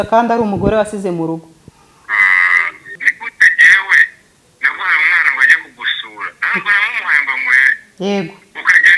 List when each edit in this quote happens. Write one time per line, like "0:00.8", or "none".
0:03.0